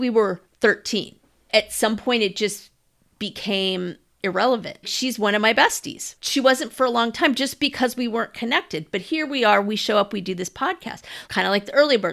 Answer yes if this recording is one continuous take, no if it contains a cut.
no